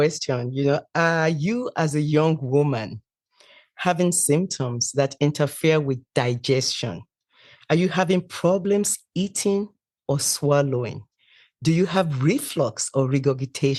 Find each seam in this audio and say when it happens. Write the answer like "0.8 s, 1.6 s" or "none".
none